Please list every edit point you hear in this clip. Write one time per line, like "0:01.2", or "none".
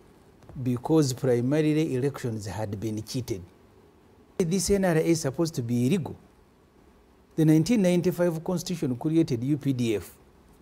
0:04.4